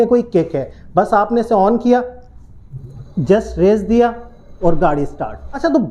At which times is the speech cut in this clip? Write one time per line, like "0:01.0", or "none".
none